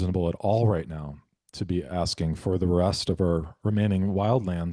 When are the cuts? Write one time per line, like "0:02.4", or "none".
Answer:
none